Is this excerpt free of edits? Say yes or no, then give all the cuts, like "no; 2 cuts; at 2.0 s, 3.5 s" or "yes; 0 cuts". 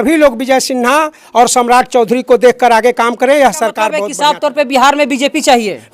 no; 1 cut; at 4.0 s